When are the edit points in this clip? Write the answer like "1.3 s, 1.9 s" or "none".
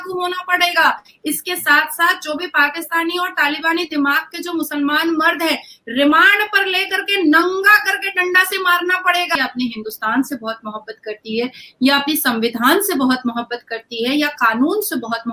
9.4 s